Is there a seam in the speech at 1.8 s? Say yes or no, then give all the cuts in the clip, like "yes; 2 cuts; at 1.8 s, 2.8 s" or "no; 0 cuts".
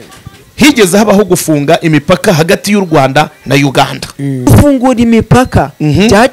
no; 1 cut; at 4.5 s